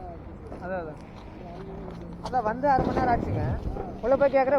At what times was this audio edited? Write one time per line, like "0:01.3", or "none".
none